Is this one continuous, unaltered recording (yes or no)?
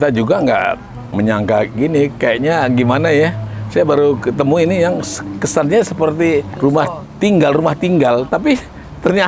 no